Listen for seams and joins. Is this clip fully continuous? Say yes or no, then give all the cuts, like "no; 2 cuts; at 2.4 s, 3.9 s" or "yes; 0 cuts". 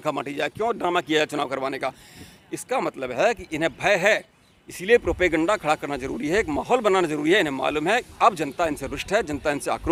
yes; 0 cuts